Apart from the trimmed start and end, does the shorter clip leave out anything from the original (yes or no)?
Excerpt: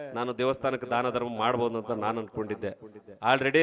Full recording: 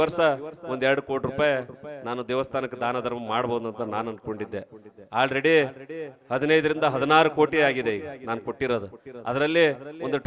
no